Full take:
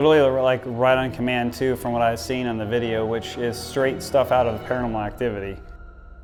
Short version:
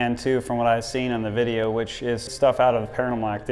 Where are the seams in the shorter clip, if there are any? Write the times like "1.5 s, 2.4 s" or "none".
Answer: 2.3 s